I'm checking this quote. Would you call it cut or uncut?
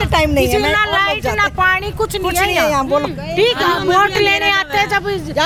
uncut